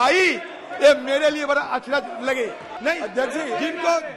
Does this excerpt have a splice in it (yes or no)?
yes